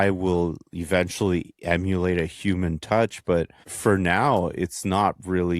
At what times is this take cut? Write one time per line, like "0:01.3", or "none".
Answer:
0:03.6